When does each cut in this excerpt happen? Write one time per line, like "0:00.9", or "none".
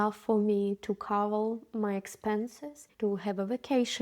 0:02.8